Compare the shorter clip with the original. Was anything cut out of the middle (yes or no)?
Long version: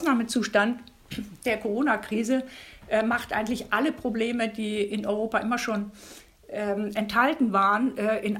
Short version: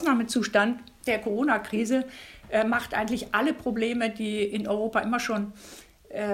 yes